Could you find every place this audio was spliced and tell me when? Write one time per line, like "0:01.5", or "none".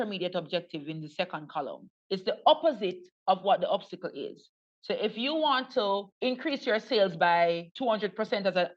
0:01.9
0:06.1
0:07.7